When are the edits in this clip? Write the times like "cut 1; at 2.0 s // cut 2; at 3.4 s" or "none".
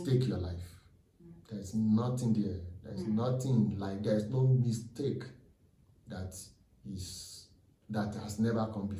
none